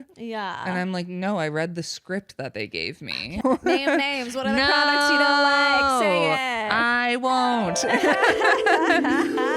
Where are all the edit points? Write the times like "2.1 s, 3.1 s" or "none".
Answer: 3.4 s